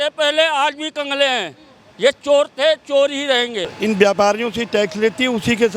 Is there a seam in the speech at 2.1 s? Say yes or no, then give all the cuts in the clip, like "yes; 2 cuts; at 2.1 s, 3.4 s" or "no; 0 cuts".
no; 1 cut; at 3.7 s